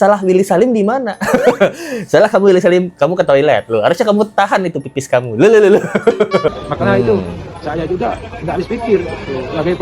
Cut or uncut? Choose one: cut